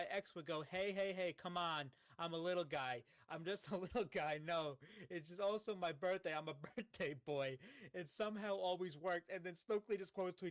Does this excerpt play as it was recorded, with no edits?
yes; 0 cuts

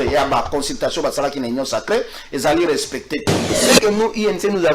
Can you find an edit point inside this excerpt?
yes; 1 cut; at 3.6 s

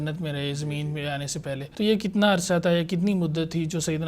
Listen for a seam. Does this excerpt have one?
yes; 1 cut; at 1.7 s

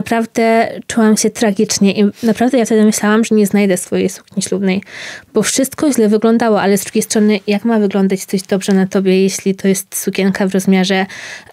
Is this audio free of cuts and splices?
yes; 0 cuts

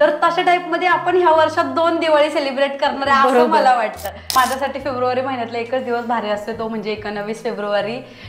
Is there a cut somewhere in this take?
yes; 1 cut; at 4.3 s

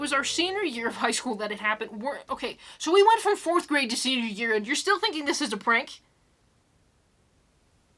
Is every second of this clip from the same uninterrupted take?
yes; 0 cuts

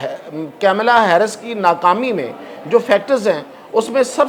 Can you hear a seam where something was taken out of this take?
no; 0 cuts

